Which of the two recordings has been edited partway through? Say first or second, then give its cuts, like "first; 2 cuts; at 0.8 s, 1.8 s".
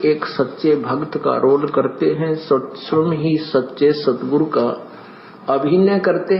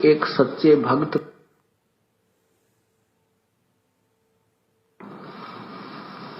first; 1 cut; at 1.1 s